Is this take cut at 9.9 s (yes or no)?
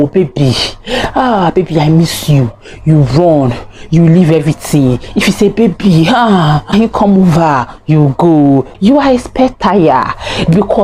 no